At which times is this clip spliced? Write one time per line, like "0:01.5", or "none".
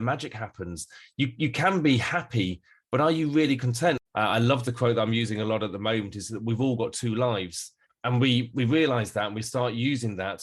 0:04.0